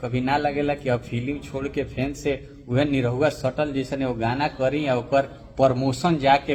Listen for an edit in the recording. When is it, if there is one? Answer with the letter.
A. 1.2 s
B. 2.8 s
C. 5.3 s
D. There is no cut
D